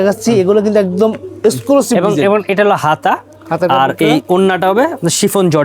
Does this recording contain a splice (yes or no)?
no